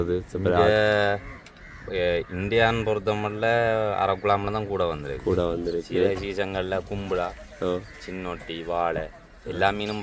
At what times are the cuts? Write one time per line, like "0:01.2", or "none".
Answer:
none